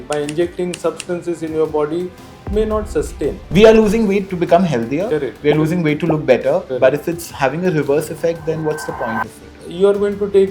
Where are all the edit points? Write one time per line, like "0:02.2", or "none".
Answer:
0:03.4
0:09.6